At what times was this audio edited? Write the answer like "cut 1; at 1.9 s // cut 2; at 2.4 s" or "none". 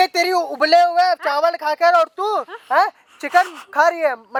none